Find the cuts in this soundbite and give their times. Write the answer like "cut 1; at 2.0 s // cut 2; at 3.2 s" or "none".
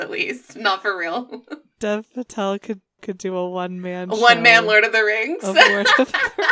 cut 1; at 2.6 s